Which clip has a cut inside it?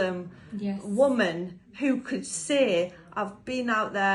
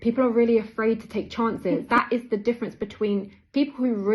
second; 1 cut; at 1.8 s

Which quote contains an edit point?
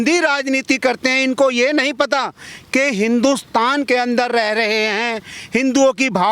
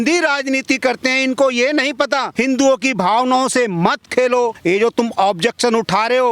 second; 2 cuts; at 2.3 s, 4.6 s

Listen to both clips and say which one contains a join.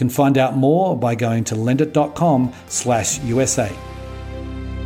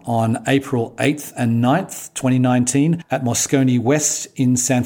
first; 1 cut; at 3.8 s

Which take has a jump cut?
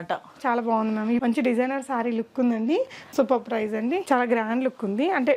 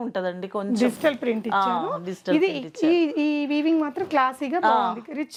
first; 3 cuts; at 1.2 s, 3.0 s, 4.0 s

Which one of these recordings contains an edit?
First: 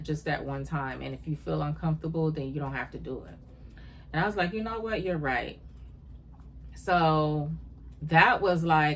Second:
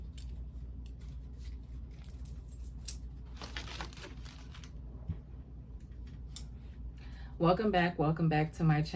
second; 1 cut; at 7.3 s

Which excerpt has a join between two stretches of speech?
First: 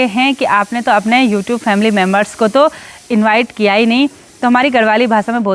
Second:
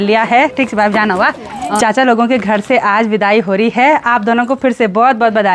second; 1 cut; at 1.8 s

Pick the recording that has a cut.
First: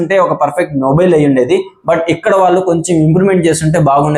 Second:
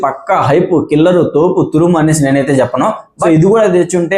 second; 1 cut; at 3.1 s

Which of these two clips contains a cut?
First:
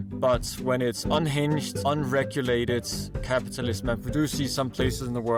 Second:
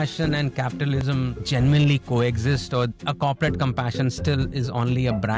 second; 1 cut; at 1.0 s

